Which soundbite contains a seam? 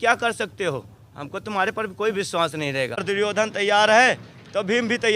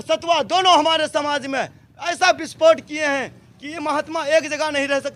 first; 1 cut; at 3.0 s

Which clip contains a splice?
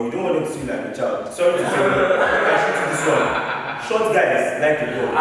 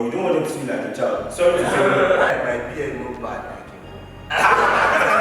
second; 1 cut; at 2.3 s

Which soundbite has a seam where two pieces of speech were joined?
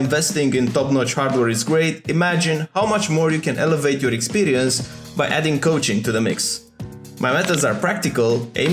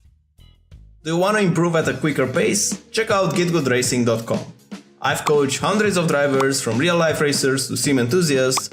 second; 1 cut; at 1.0 s

